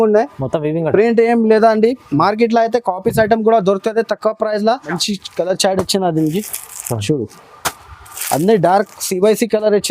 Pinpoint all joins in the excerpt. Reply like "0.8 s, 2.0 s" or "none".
5.0 s

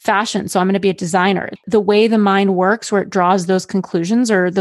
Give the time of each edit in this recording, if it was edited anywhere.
1.6 s

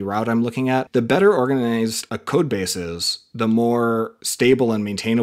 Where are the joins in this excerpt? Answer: 0.9 s, 2.1 s, 4.2 s

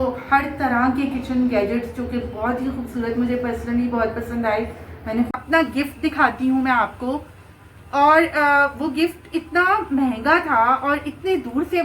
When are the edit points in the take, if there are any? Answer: 5.3 s

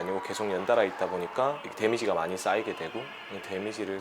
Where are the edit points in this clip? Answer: 1.7 s

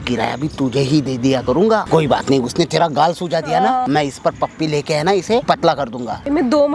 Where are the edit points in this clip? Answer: 1.8 s, 3.8 s, 5.9 s

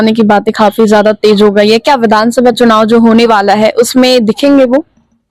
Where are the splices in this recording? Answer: none

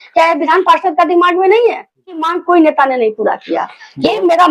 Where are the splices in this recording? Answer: 2.3 s

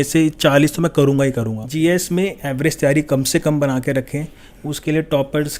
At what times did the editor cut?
1.6 s

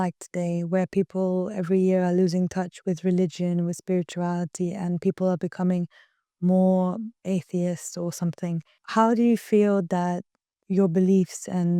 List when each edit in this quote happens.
7.2 s, 8.8 s

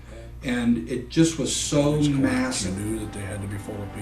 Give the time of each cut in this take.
2.6 s

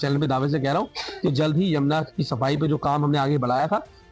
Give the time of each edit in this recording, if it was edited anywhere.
none

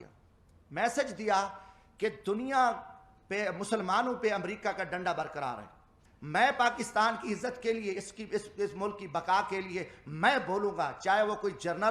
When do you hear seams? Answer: 6.0 s

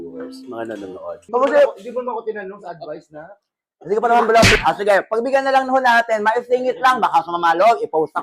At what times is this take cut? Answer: 1.3 s

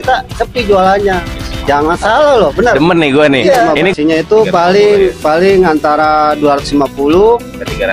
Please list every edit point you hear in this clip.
3.9 s

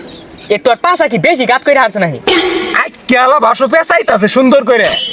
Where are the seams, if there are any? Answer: 2.2 s

